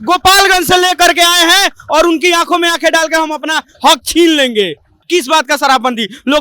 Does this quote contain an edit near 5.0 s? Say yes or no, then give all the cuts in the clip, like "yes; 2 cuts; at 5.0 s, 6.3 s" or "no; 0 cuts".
yes; 1 cut; at 5.0 s